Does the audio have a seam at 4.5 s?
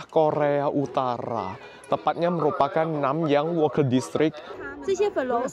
yes; 1 cut; at 4.5 s

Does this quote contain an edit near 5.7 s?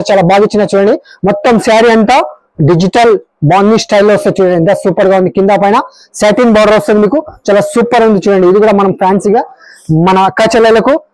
no; 0 cuts

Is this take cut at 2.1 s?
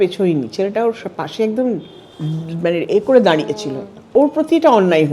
no; 1 cut; at 4.1 s

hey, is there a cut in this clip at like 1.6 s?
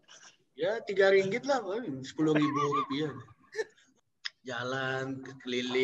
no; 1 cut; at 3.8 s

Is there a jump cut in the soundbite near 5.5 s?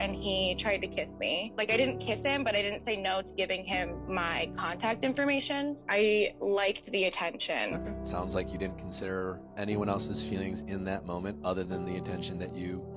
no; 2 cuts; at 2.2 s, 9.5 s

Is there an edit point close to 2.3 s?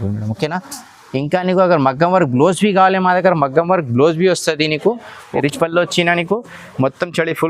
no; 1 cut; at 5.4 s

